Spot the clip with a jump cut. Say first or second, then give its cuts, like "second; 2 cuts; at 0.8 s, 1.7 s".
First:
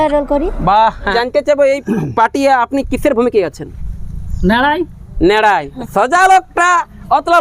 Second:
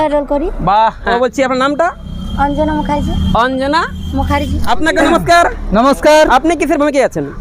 first; 2 cuts; at 1.1 s, 5.8 s